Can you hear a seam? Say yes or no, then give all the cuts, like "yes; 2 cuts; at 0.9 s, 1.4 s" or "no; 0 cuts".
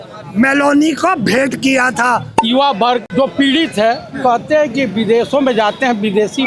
yes; 2 cuts; at 2.3 s, 3.1 s